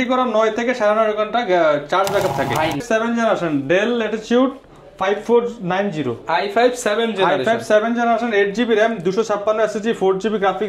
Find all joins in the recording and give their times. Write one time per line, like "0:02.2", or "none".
0:02.8